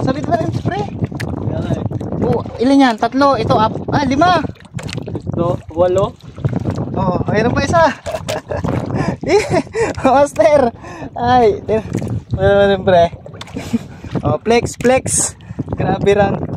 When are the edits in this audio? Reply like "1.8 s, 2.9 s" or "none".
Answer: none